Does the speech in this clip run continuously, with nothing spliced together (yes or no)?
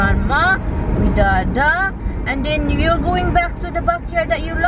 yes